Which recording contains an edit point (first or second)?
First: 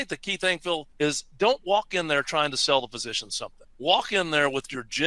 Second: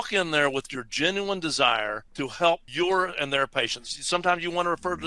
second